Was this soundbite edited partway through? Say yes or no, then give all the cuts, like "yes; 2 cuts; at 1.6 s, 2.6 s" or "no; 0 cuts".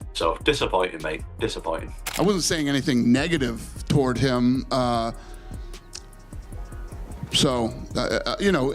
yes; 1 cut; at 2.0 s